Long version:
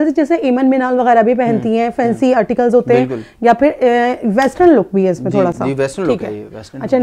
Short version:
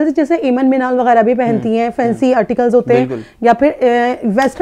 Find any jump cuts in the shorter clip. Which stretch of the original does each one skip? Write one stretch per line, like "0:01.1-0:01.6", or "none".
none